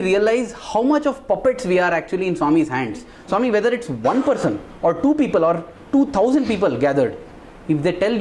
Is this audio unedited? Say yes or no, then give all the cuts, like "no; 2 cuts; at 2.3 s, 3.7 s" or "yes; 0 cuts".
no; 1 cut; at 3.1 s